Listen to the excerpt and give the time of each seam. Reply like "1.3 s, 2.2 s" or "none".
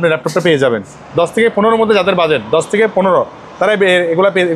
0.9 s